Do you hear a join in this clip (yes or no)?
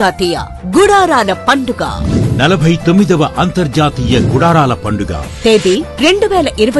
yes